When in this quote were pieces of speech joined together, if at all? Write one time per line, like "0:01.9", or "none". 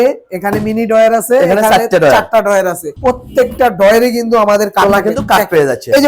none